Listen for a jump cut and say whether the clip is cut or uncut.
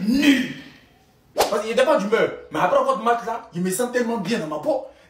cut